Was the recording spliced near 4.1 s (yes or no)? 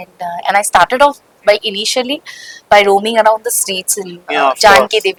no